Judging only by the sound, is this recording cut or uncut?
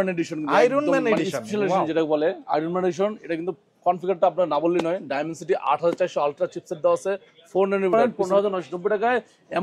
cut